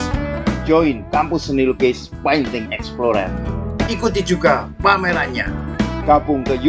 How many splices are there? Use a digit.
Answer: 0